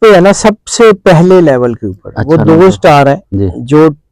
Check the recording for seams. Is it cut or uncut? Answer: uncut